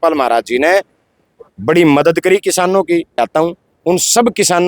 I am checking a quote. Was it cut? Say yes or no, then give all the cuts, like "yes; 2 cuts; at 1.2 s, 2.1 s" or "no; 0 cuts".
yes; 1 cut; at 3.2 s